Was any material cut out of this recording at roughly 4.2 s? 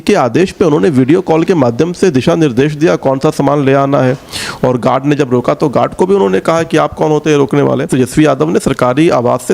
no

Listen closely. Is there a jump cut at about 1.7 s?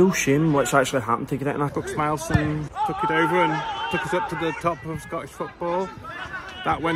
yes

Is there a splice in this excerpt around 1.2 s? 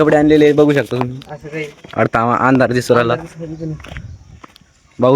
no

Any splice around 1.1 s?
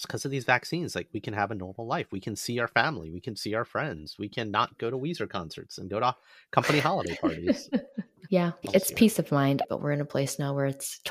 no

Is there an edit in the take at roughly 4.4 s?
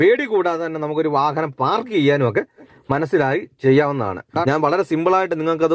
yes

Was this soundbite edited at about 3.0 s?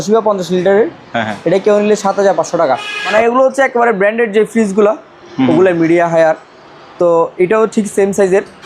yes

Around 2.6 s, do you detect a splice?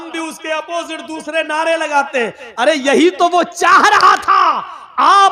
no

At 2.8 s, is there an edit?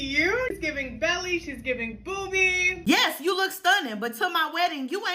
yes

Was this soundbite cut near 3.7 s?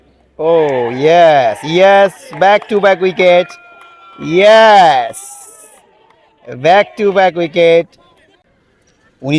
no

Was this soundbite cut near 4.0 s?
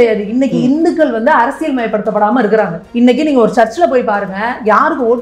no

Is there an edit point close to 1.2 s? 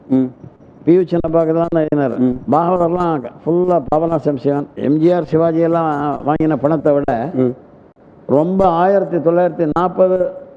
no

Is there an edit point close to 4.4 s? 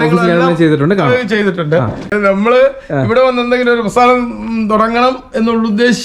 no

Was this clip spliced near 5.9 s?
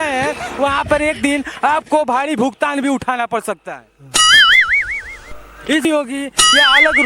yes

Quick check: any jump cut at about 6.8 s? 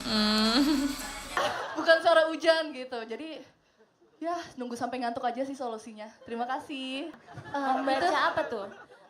yes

